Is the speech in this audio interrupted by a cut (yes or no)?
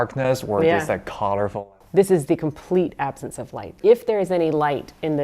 yes